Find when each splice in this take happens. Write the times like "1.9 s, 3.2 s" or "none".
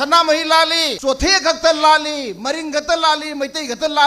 0.9 s